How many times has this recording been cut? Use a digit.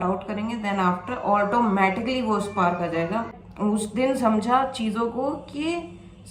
1